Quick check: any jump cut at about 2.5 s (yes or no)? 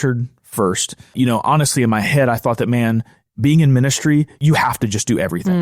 no